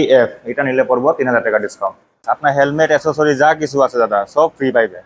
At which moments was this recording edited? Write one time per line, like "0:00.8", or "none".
0:02.1